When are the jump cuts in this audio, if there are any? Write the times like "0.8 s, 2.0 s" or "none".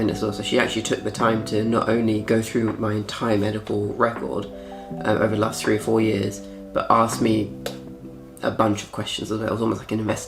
none